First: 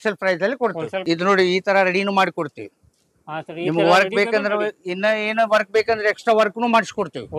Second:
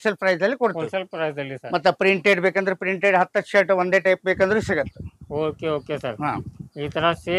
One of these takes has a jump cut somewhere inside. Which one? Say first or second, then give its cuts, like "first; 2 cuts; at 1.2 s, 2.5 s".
first; 1 cut; at 1.1 s